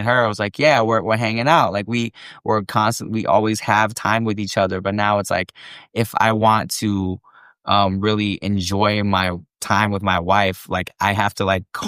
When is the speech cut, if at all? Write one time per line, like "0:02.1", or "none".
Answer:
none